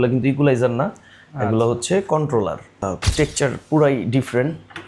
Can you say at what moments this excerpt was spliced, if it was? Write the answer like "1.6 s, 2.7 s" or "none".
2.9 s